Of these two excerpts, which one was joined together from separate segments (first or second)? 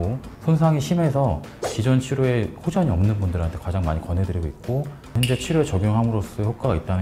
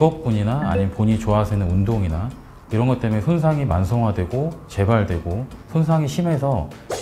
first